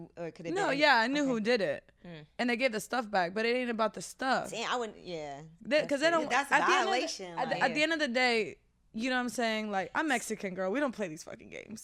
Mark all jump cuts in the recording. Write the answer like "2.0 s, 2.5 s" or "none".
none